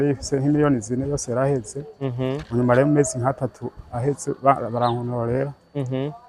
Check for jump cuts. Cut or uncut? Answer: uncut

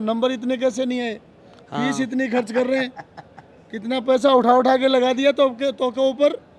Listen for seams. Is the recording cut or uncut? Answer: uncut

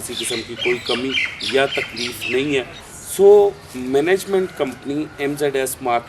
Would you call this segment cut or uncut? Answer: cut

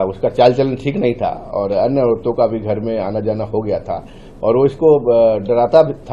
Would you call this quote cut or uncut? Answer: uncut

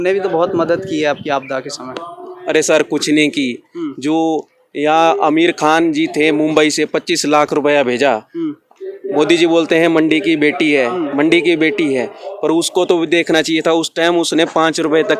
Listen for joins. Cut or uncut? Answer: uncut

